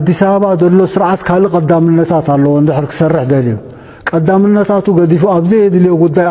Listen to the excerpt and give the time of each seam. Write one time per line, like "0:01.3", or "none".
none